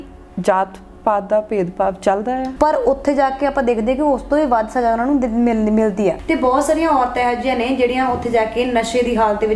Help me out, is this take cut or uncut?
cut